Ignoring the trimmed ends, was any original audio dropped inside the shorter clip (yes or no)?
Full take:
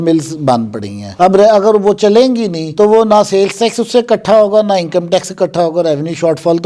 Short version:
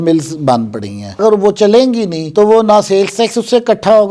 yes